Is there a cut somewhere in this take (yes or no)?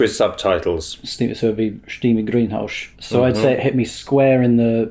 yes